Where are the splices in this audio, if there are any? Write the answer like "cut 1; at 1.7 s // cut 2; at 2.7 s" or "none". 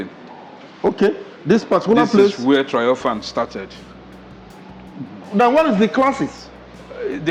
none